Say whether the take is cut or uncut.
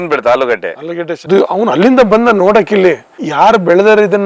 cut